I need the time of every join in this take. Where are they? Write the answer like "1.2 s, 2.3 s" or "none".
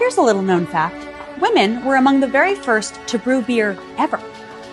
1.1 s